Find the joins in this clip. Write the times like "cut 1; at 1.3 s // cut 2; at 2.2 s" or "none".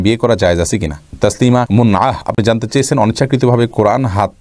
cut 1; at 1.1 s

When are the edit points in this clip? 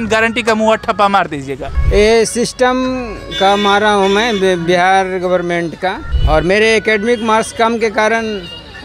cut 1; at 1.7 s // cut 2; at 6.1 s

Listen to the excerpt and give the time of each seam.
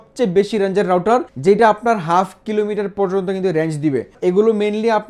cut 1; at 1.3 s // cut 2; at 4.1 s

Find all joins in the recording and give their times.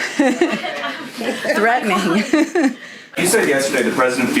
cut 1; at 3.2 s

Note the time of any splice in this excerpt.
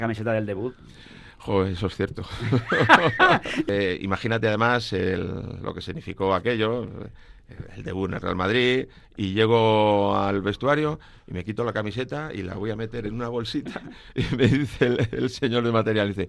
cut 1; at 3.7 s // cut 2; at 9.0 s

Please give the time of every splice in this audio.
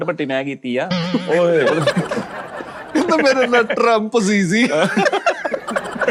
none

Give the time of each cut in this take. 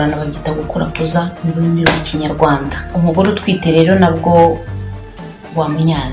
cut 1; at 2.8 s

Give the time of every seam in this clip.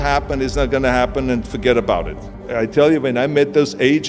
cut 1; at 2.4 s

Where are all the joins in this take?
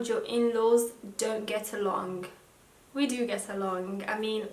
none

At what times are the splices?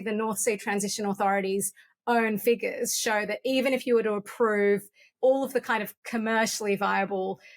cut 1; at 5.1 s

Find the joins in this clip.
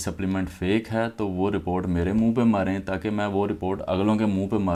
none

